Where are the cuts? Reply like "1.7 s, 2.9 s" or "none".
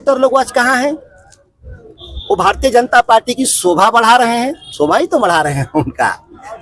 4.6 s